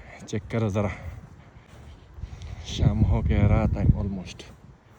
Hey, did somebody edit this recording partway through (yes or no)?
no